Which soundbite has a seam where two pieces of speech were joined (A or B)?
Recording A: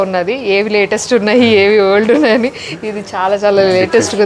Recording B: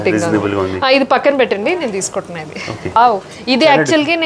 B